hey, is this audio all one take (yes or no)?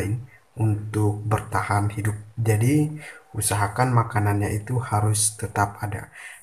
yes